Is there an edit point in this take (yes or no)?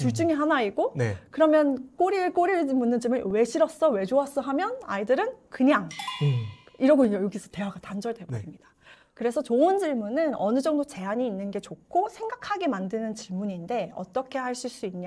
no